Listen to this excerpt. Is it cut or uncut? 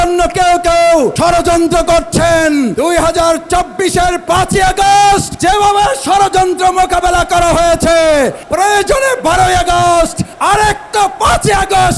cut